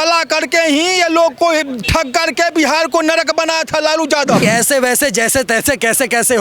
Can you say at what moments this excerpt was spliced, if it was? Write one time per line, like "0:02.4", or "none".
0:04.4

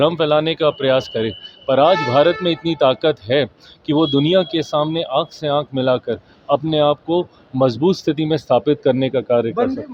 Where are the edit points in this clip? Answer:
none

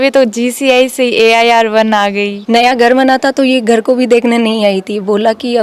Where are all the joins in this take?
0:02.3

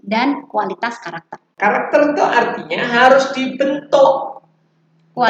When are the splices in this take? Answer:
0:01.5

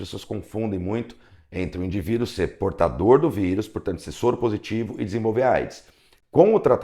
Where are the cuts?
none

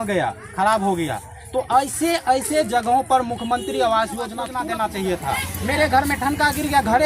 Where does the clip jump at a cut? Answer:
0:04.4

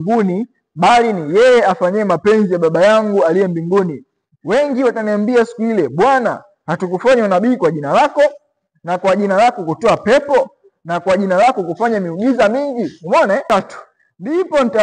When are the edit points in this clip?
0:13.5

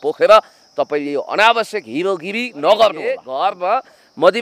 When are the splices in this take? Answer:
0:03.3

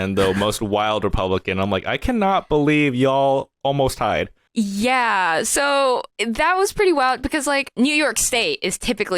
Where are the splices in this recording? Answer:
0:04.4
0:06.1
0:07.7

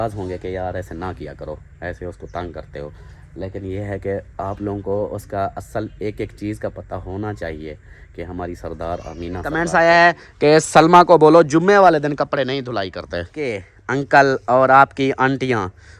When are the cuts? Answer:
0:09.6
0:13.7

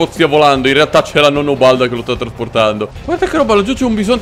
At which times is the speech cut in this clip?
0:03.0

